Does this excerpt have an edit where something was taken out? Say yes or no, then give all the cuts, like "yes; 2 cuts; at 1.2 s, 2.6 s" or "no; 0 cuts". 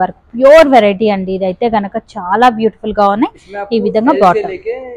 no; 0 cuts